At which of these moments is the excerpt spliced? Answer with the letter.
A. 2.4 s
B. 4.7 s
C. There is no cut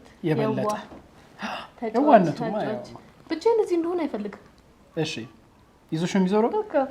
C